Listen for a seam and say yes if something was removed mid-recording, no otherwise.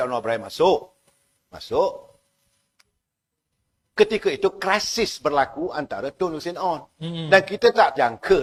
no